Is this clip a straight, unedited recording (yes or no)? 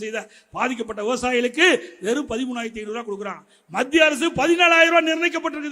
yes